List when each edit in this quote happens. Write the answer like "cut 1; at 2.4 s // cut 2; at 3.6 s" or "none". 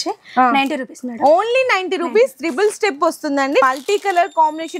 cut 1; at 3.6 s